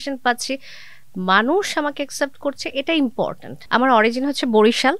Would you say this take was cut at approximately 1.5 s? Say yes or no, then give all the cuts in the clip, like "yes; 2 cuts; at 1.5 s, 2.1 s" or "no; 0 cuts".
no; 1 cut; at 3.5 s